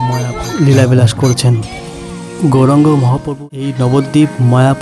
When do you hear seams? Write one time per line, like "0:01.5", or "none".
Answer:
0:03.2